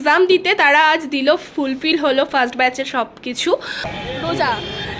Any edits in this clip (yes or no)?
yes